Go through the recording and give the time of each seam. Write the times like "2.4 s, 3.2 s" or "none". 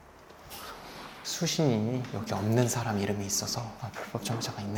none